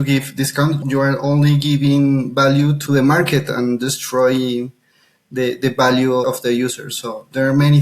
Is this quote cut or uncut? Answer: cut